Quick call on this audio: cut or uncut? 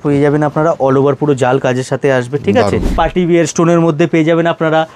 cut